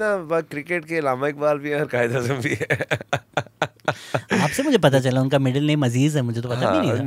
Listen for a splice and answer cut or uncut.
uncut